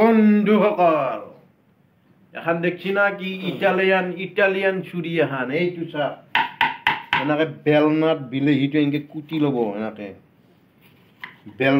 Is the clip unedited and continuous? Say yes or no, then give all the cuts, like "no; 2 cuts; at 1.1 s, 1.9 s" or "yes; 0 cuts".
yes; 0 cuts